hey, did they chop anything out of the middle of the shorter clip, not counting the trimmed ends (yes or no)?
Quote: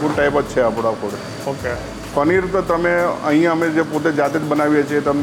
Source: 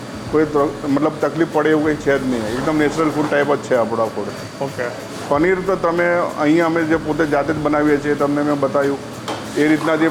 no